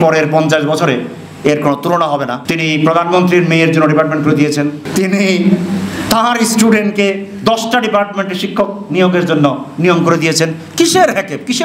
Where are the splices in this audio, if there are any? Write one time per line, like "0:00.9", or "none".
0:02.4
0:04.8